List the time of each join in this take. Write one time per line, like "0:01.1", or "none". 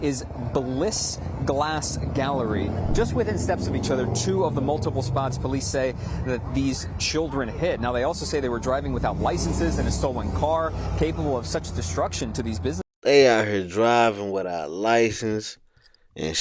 none